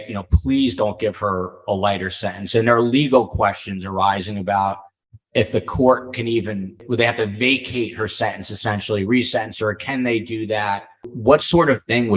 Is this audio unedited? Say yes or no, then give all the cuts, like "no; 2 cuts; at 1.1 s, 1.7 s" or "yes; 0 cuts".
no; 1 cut; at 11.1 s